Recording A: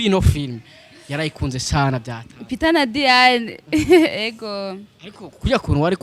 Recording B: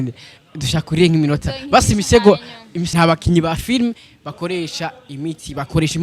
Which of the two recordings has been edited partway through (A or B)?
B